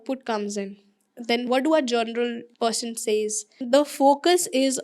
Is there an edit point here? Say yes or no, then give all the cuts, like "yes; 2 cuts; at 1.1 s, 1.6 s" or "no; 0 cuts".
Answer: yes; 3 cuts; at 1.5 s, 2.5 s, 3.6 s